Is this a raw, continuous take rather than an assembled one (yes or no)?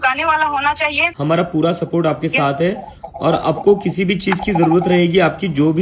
no